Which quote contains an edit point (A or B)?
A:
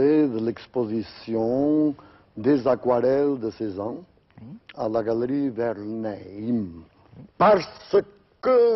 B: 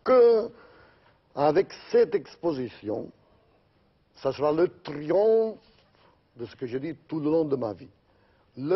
B